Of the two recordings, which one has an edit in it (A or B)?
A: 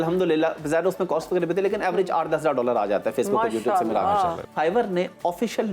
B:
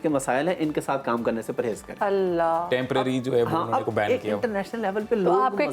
A